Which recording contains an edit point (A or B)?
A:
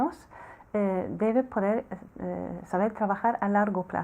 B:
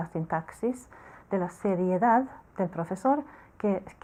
A